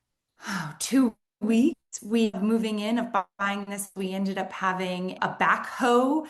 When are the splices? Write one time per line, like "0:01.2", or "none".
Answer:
0:05.2